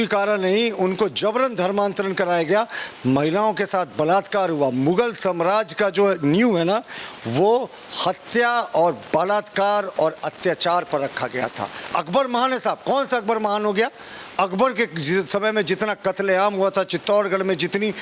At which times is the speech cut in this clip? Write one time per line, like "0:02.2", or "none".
none